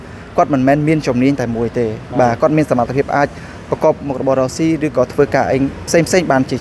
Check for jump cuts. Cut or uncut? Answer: uncut